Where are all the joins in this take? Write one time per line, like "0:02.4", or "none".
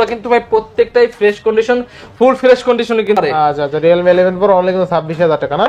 0:03.1